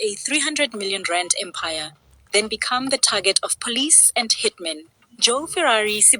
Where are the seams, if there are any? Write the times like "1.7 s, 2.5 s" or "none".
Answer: 3.1 s